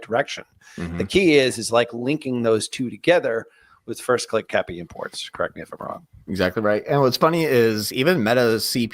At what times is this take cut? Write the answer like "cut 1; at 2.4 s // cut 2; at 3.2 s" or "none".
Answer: none